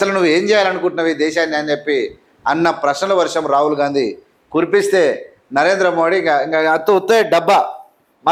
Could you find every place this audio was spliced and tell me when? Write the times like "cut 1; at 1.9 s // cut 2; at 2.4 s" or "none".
none